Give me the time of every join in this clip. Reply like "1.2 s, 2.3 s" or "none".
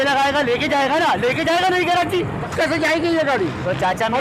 2.4 s